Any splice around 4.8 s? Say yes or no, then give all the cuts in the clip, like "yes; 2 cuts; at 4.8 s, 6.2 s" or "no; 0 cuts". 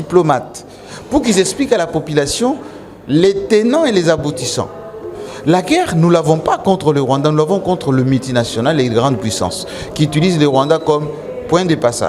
no; 0 cuts